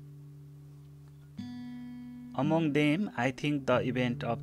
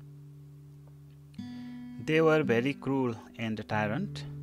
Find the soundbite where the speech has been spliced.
first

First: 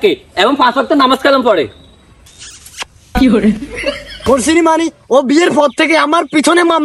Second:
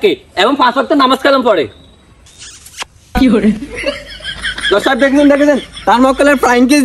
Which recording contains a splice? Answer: first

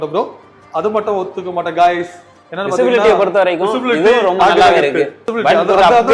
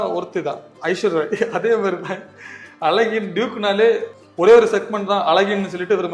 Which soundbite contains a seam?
first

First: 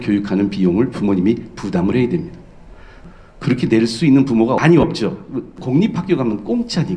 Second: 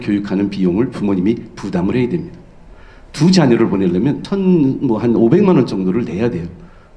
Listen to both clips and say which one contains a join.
first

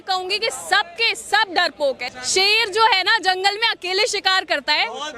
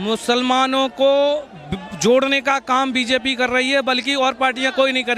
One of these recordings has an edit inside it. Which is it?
first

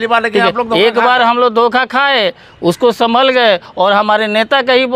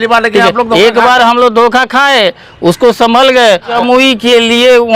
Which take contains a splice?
second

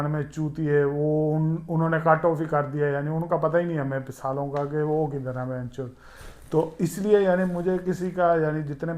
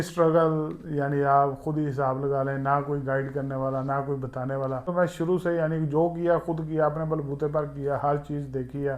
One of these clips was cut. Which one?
second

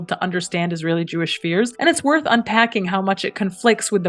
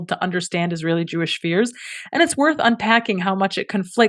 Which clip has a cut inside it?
first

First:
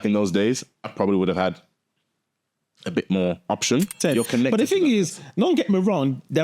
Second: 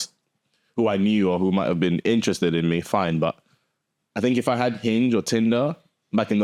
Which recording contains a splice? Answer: first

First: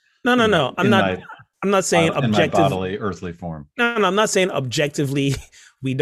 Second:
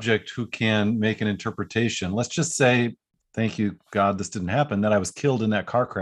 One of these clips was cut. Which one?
second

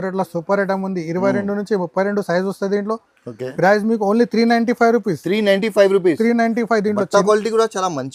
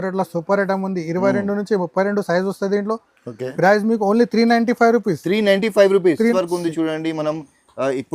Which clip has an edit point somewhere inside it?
second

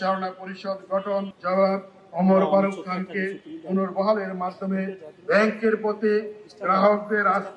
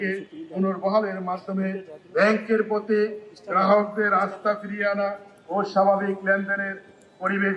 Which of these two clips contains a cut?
first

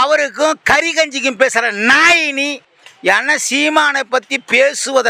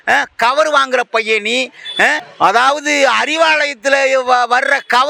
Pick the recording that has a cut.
first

